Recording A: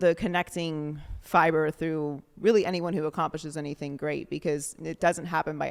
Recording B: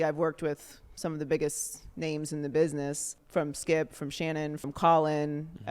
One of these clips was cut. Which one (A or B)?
B